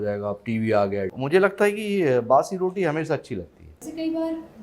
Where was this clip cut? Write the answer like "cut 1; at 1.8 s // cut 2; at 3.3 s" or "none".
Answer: cut 1; at 1.1 s // cut 2; at 3.7 s